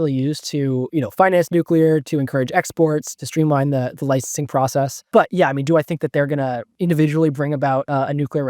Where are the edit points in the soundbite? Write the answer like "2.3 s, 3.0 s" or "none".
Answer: 3.1 s, 5.0 s, 6.7 s